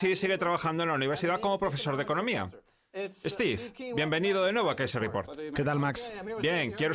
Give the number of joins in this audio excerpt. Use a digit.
1